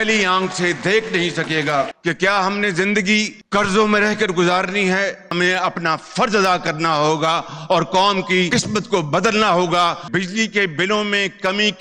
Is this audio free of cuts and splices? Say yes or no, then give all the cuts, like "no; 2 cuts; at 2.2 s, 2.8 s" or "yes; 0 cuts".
no; 3 cuts; at 1.9 s, 5.3 s, 10.0 s